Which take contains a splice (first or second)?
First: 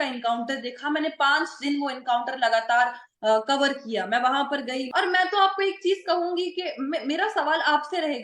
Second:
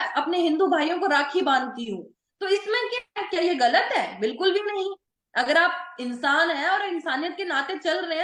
first